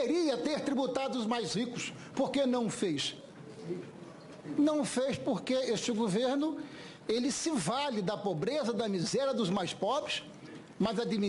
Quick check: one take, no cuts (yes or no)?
no